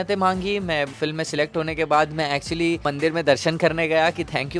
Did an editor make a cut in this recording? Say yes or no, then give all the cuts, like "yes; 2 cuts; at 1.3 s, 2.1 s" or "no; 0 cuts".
yes; 2 cuts; at 0.9 s, 2.9 s